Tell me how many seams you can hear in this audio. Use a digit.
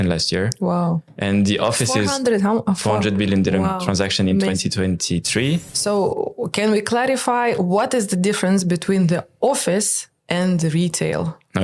1